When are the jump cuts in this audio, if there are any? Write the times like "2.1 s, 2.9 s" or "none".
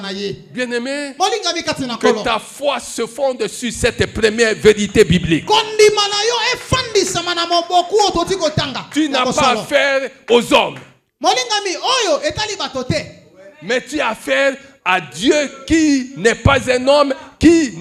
none